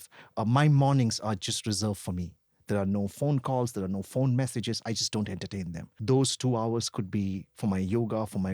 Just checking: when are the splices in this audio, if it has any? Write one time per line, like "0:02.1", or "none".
0:06.0